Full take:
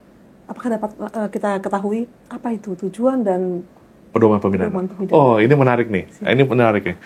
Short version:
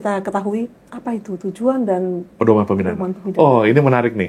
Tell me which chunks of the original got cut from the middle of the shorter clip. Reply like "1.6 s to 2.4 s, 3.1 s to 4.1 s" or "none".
3.6 s to 4.0 s

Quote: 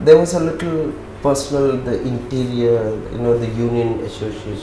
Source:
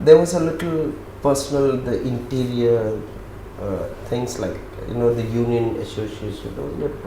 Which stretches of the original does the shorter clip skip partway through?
3.1 s to 4.8 s

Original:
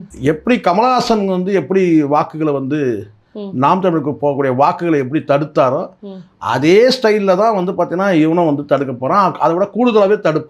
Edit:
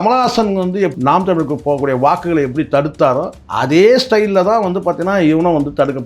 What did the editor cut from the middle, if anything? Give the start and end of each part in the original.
1.7 s to 3.5 s, 6.0 s to 6.3 s

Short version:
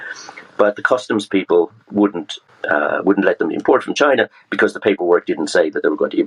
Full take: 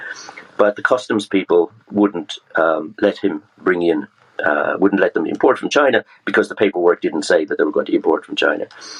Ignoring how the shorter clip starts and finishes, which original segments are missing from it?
2.4 s to 4.1 s

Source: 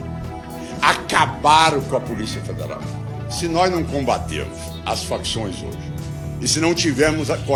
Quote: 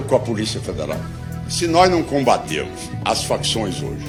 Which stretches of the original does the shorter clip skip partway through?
none

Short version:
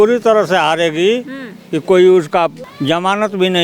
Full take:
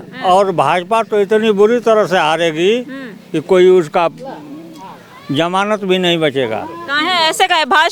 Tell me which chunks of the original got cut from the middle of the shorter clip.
4.3 s to 5.2 s

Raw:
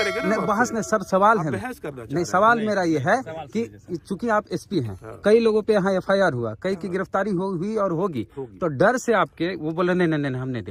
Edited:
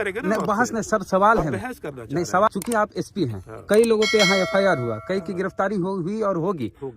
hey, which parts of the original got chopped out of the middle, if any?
2.5 s to 4.0 s

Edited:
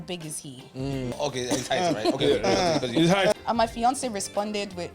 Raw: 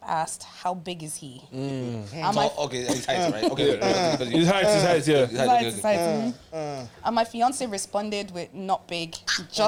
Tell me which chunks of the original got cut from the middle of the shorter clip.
1.9 s to 2.5 s, 4.7 s to 6.9 s

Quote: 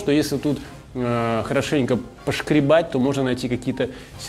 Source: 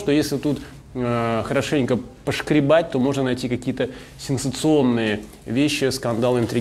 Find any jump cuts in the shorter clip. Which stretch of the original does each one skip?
none

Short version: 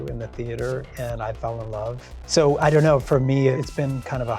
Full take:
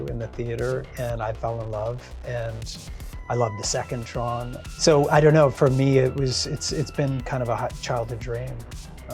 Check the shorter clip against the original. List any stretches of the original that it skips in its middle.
2.1 s to 4.6 s, 6.1 s to 6.8 s

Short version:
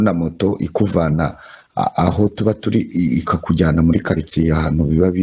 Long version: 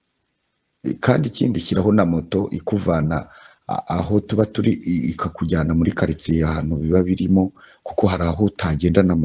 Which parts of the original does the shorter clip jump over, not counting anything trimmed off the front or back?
none

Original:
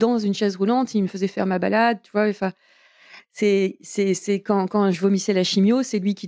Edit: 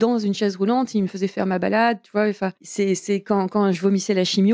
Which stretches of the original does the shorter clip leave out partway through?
2.6 s to 3.8 s

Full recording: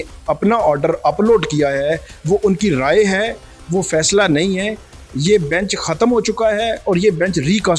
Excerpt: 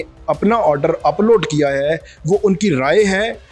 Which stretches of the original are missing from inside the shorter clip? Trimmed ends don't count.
none

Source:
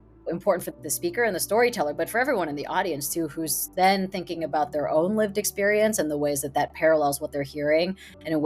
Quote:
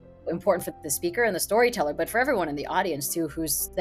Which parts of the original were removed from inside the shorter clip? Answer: none

